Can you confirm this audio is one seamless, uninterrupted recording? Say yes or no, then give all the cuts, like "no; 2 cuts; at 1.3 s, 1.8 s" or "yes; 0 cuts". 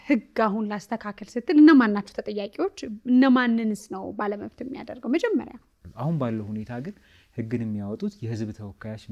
no; 1 cut; at 5.7 s